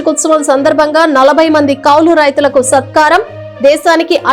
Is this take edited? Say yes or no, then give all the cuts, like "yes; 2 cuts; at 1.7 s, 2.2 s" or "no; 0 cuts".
no; 0 cuts